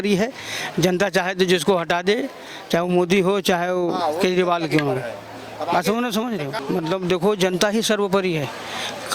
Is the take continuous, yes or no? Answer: no